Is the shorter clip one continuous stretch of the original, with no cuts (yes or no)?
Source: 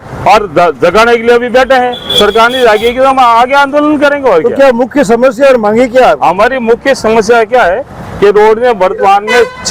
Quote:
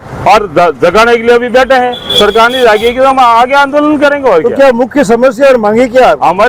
yes